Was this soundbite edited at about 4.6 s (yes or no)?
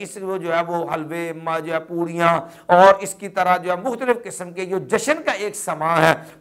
no